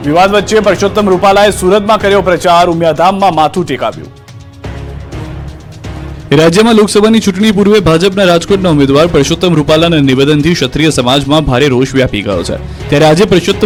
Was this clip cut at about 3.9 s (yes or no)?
no